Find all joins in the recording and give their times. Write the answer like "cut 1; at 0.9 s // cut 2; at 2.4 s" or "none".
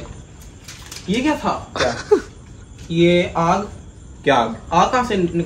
none